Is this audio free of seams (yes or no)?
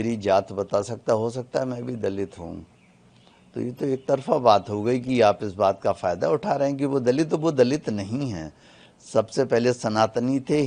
yes